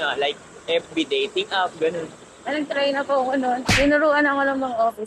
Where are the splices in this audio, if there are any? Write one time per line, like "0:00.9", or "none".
0:03.6